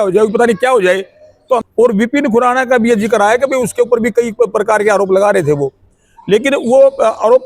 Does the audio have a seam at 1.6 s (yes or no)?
yes